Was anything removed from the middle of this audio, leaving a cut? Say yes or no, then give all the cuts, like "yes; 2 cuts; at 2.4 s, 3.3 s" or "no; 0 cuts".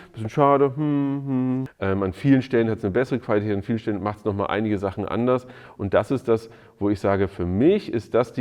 yes; 1 cut; at 1.7 s